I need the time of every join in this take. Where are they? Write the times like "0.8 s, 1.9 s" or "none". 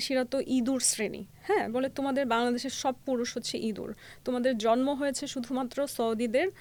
none